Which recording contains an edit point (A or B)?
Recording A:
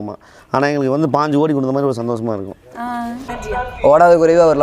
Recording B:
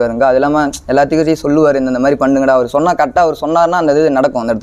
A